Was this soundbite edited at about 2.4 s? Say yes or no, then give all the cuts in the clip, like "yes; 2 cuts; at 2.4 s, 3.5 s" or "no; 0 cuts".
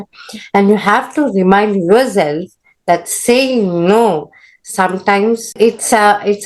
no; 1 cut; at 5.6 s